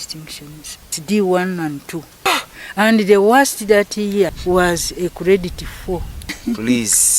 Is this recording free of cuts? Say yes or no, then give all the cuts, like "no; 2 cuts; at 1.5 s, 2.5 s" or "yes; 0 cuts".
no; 4 cuts; at 1.0 s, 2.3 s, 4.4 s, 6.4 s